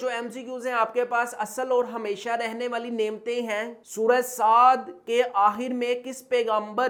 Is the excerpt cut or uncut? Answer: uncut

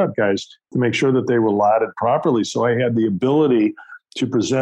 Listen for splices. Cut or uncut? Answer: uncut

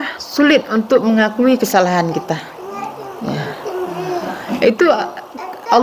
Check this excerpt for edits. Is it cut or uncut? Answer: uncut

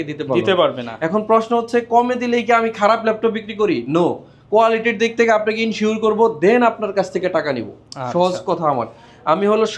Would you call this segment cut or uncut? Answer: uncut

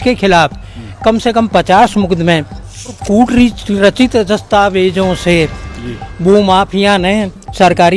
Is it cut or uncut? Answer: cut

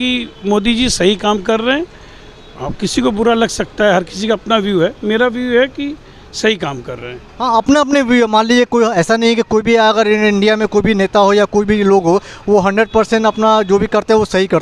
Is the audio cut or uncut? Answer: uncut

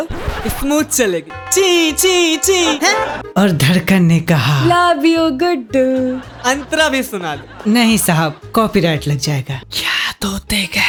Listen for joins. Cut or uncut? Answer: uncut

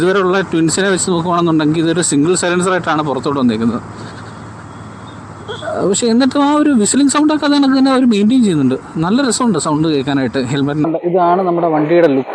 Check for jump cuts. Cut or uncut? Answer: cut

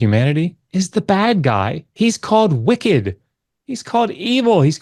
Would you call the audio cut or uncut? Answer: uncut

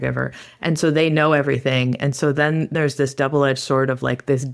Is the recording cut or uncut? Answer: cut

